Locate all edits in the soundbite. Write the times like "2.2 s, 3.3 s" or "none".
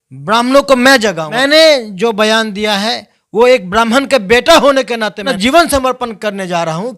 1.3 s, 5.3 s